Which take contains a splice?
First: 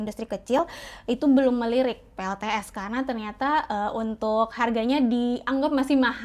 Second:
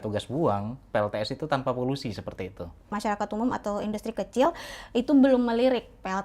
second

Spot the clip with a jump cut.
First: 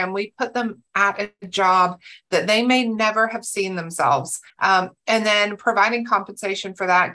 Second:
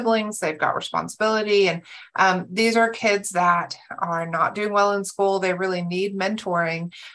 first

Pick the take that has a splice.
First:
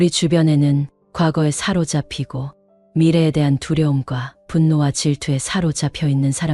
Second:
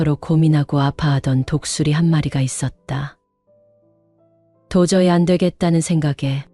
second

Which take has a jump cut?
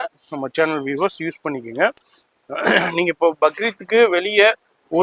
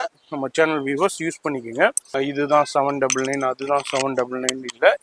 second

